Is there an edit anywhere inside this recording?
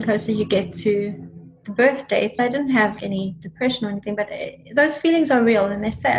yes; 2 cuts; at 2.3 s, 3.0 s

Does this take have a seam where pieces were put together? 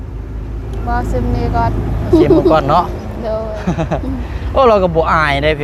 no; 0 cuts

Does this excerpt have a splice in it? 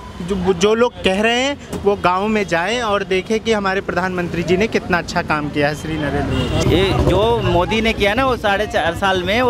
yes; 1 cut; at 6.6 s

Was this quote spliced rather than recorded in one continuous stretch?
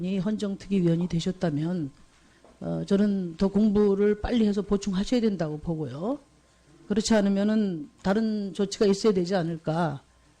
yes; 1 cut; at 7.9 s

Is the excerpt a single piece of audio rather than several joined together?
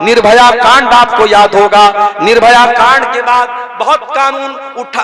yes; 0 cuts

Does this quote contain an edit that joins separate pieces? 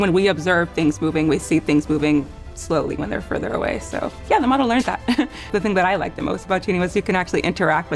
yes; 1 cut; at 5.4 s

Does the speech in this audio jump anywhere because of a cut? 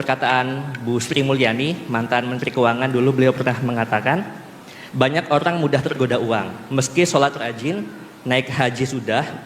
no; 0 cuts

